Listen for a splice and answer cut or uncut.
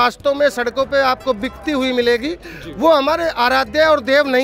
uncut